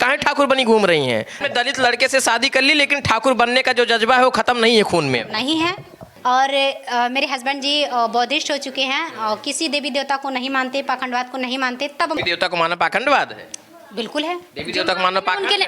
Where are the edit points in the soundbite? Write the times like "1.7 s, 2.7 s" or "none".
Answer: 1.4 s, 6.0 s, 12.2 s

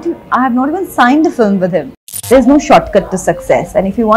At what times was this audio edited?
2.2 s

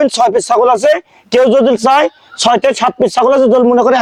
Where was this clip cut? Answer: none

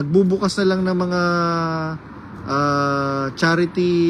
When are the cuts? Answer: none

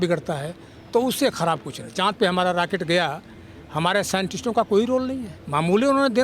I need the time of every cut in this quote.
1.8 s, 5.3 s

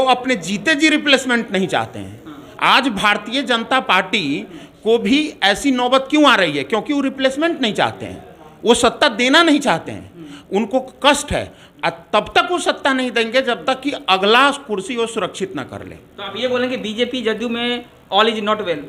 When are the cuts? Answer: none

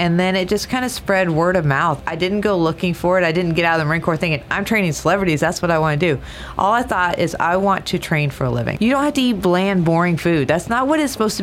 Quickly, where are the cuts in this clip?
2.0 s, 8.7 s

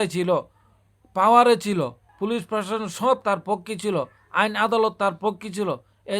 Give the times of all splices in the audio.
2.0 s

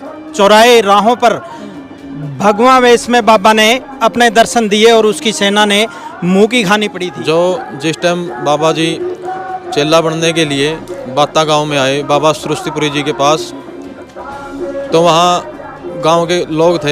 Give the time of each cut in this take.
7.0 s

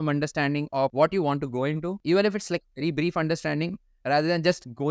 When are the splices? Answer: 0.9 s, 1.9 s

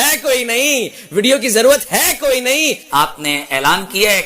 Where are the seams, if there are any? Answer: 2.8 s

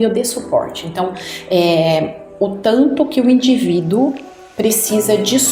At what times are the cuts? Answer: none

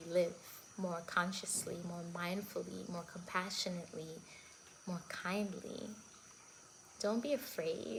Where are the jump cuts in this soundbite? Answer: none

